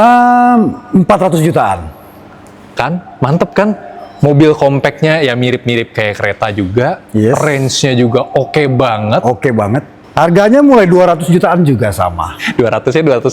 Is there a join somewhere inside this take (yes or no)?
yes